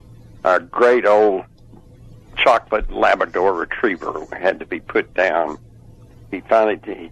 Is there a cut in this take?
yes; 1 cut; at 6.1 s

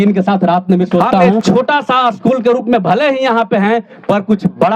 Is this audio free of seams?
no; 1 cut; at 1.4 s

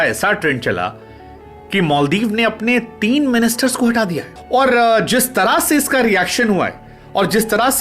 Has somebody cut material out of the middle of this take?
yes; 1 cut; at 4.3 s

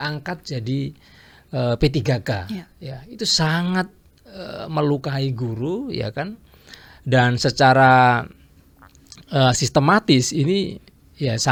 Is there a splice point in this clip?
no; 0 cuts

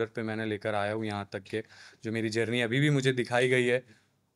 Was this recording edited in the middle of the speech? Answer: no; 0 cuts

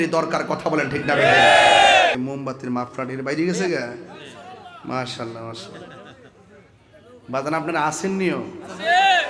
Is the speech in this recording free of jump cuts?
no; 1 cut; at 2.2 s

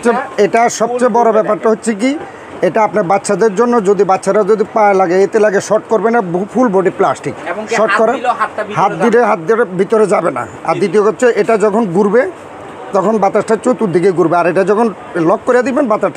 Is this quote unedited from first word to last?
yes; 0 cuts

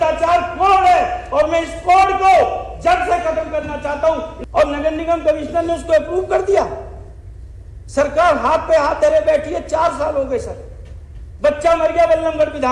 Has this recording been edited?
yes; 1 cut; at 4.4 s

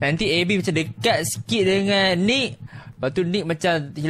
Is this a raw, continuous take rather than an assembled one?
yes; 0 cuts

